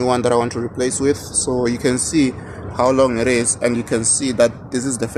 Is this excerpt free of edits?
yes; 0 cuts

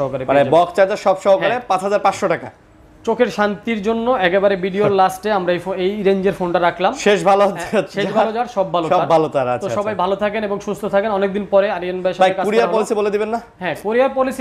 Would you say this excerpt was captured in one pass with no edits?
yes; 0 cuts

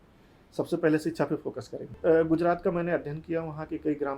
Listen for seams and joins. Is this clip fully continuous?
no; 1 cut; at 1.9 s

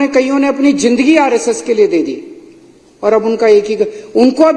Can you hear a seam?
no; 0 cuts

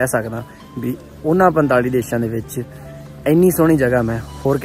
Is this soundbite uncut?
yes; 0 cuts

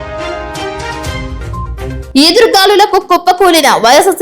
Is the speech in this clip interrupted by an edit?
yes; 1 cut; at 0.9 s

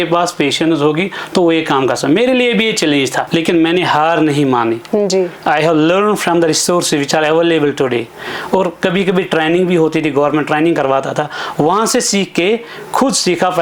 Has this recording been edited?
yes; 1 cut; at 3.3 s

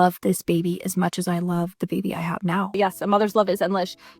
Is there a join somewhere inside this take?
yes; 1 cut; at 2.7 s

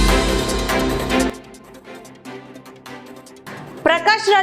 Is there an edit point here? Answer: yes; 2 cuts; at 1.2 s, 2.9 s

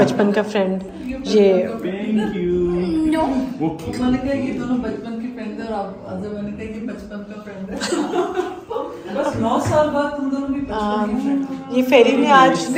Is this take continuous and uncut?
yes; 0 cuts

